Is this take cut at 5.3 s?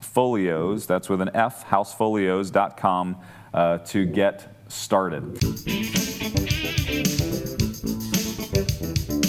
yes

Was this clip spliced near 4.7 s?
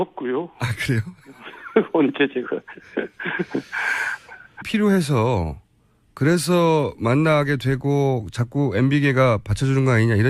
no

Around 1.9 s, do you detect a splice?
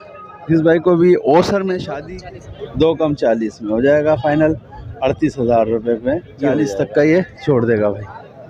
yes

